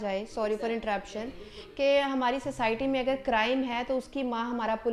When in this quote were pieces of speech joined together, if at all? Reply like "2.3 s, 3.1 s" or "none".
none